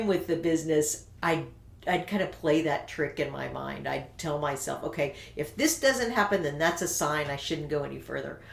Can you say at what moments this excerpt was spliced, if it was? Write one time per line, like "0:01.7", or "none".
none